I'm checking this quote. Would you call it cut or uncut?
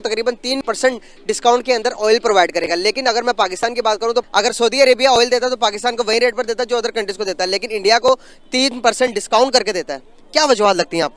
cut